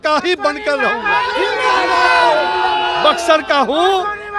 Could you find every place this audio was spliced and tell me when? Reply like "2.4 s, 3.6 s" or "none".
none